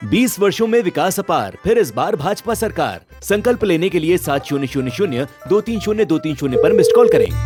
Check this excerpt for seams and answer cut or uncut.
uncut